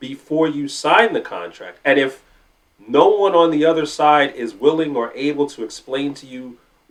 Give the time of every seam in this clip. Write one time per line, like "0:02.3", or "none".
none